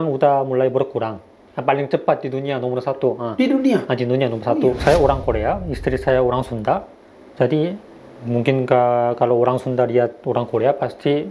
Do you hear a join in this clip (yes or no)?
yes